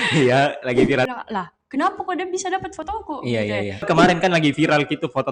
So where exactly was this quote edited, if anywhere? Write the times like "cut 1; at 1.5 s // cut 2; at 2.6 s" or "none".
cut 1; at 1.1 s // cut 2; at 3.9 s